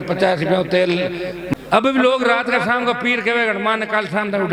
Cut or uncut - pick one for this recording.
uncut